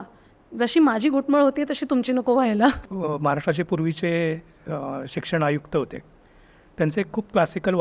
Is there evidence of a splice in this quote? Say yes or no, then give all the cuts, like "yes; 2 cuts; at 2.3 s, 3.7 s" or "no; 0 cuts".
yes; 1 cut; at 2.8 s